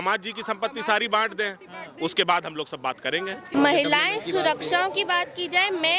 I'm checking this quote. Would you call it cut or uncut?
cut